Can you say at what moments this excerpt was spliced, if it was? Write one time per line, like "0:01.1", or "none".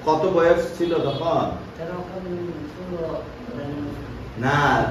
none